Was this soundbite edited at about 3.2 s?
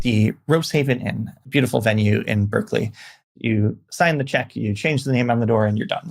yes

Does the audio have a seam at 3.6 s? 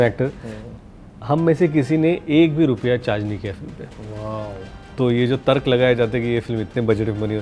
no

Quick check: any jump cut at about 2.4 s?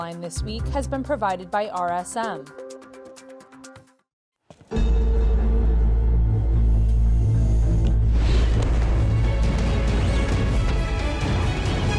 yes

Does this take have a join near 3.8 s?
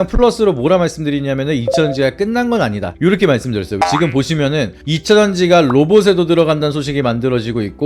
yes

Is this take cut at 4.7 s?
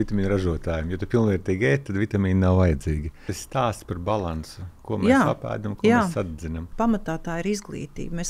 no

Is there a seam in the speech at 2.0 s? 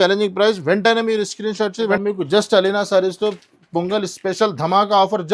yes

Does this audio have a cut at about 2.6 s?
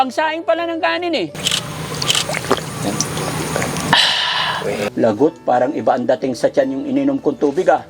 no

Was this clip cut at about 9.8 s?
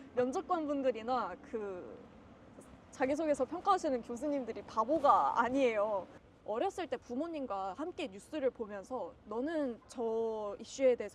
no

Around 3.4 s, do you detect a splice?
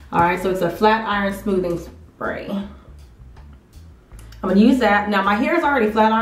no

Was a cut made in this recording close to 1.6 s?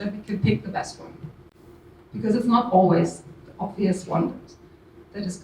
no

